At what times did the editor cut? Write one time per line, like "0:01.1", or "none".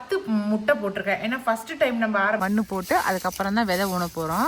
0:02.4